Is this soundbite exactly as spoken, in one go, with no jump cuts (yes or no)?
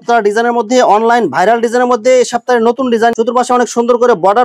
yes